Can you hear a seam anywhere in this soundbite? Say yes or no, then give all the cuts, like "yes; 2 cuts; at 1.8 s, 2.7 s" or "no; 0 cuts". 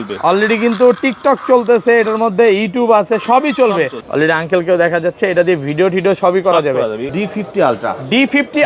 yes; 2 cuts; at 4.0 s, 7.1 s